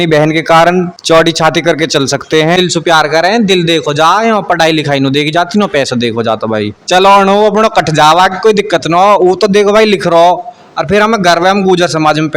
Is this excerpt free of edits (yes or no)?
no